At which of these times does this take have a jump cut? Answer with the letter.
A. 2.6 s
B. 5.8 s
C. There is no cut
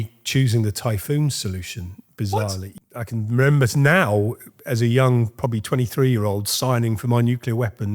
A